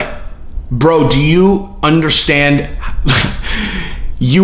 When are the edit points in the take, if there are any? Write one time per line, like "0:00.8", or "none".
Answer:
none